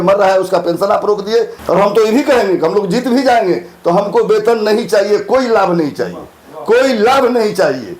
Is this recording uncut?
no; 1 cut; at 1.5 s

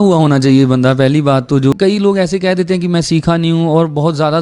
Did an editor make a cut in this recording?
yes; 1 cut; at 1.7 s

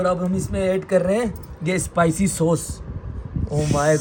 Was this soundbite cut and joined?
no; 0 cuts

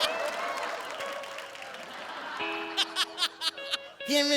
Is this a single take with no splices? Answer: yes; 0 cuts

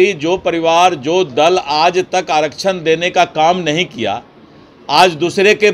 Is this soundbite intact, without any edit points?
yes; 0 cuts

